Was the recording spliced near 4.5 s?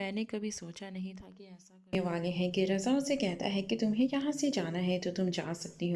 no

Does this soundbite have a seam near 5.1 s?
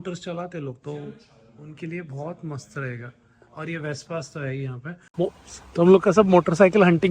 yes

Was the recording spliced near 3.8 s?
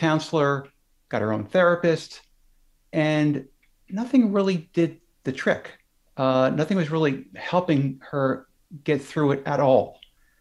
no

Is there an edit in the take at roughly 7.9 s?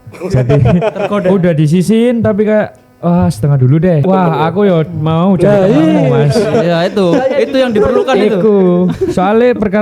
no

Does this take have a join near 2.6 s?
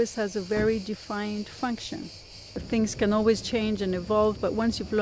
yes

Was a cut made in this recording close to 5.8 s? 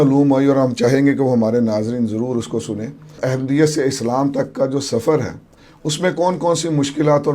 no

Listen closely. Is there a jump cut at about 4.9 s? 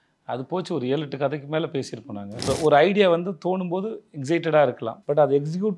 yes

